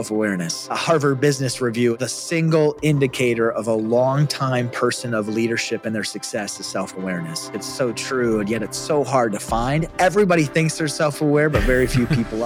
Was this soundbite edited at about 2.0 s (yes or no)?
yes